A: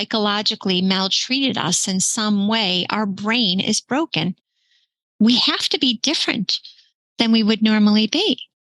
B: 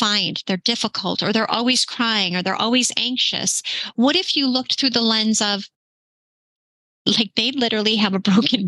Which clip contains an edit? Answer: A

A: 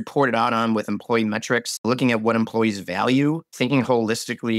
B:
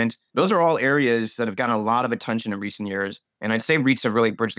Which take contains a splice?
A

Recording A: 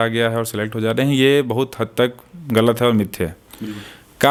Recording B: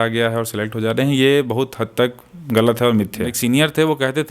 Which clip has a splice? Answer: B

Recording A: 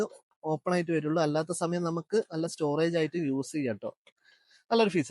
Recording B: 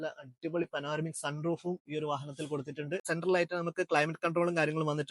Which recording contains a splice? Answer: B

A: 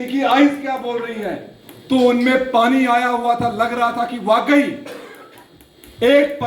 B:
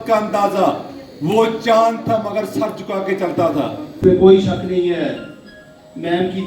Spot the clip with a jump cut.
B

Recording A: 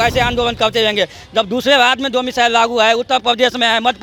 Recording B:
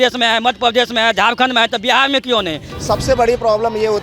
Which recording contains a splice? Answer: B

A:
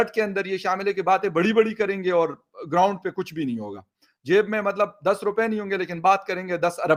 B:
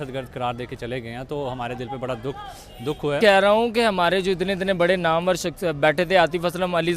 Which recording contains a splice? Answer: B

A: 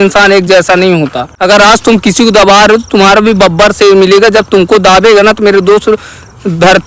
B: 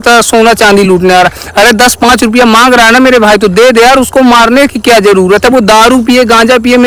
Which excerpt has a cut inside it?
A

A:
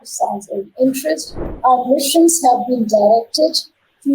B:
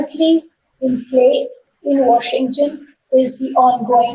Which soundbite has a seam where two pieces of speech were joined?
A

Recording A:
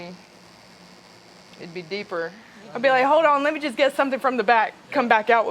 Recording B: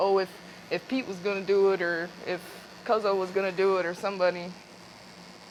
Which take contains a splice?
A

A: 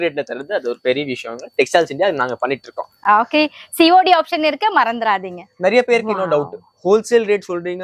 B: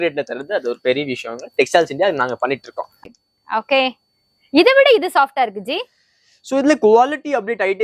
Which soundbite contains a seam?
B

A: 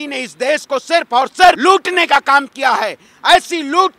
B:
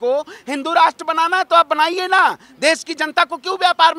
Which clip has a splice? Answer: A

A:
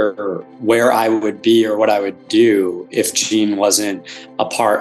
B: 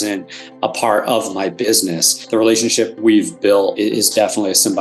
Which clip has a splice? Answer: B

